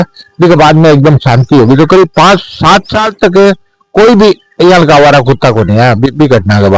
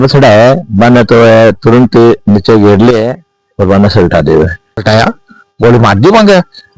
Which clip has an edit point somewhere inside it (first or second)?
second